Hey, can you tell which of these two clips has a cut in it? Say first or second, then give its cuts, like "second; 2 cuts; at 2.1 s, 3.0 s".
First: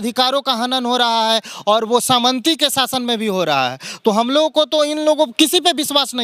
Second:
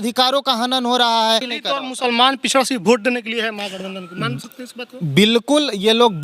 second; 1 cut; at 1.5 s